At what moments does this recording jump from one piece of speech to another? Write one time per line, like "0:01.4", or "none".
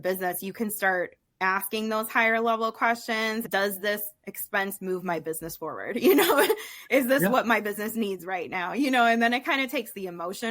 0:03.5